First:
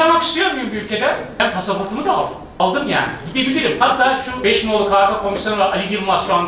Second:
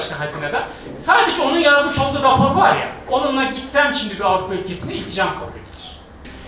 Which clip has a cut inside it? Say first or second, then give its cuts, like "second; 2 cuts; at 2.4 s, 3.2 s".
first; 3 cuts; at 1.4 s, 2.6 s, 4.4 s